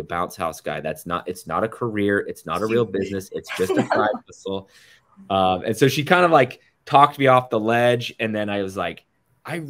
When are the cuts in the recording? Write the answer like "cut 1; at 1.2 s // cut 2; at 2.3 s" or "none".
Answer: none